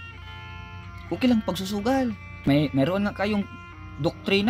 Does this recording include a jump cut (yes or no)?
yes